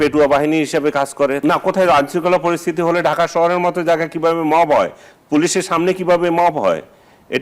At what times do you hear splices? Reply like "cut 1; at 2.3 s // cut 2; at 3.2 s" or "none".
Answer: cut 1; at 1.4 s